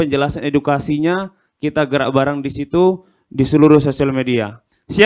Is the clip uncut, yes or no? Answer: yes